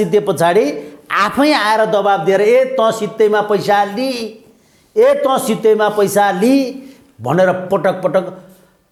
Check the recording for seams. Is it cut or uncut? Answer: uncut